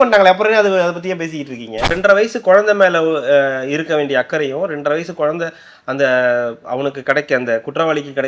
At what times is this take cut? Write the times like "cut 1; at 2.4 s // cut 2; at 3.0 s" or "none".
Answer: cut 1; at 1.9 s